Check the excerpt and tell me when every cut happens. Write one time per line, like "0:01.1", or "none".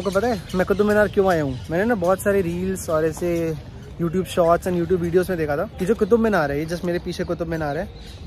none